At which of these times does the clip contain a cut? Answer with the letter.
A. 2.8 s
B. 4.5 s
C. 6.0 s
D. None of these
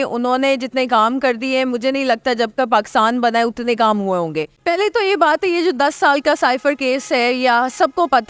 B